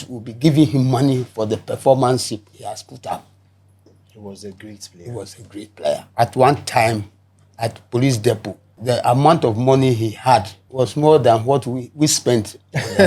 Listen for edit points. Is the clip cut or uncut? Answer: cut